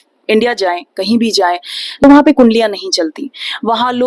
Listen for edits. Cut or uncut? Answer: cut